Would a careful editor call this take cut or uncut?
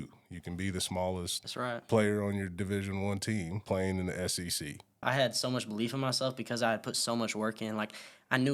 cut